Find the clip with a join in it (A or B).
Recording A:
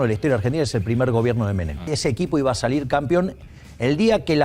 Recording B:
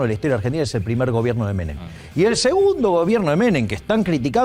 A